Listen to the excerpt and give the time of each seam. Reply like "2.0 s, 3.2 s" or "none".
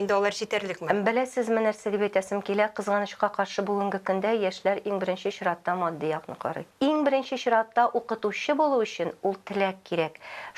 6.6 s